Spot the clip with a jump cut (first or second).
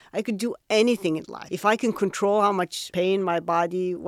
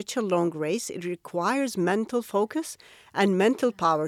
first